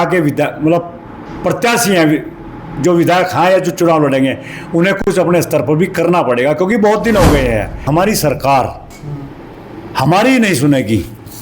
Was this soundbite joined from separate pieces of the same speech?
yes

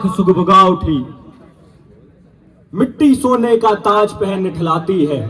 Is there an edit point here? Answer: no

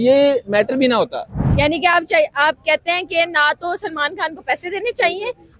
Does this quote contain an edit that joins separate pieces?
yes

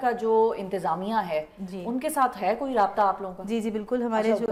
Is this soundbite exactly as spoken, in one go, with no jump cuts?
yes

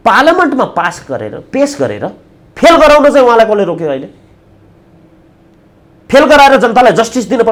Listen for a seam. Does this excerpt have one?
no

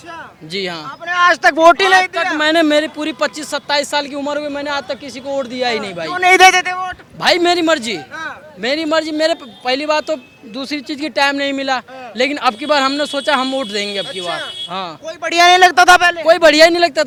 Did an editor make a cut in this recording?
no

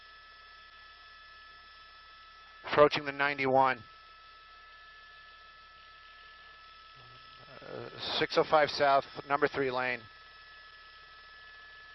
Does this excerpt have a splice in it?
yes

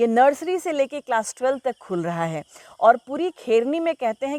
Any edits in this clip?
no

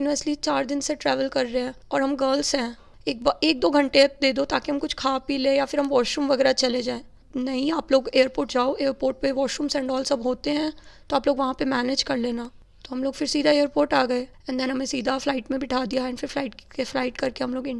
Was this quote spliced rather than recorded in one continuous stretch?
yes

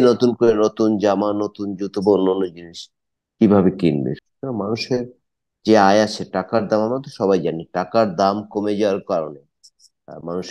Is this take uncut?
no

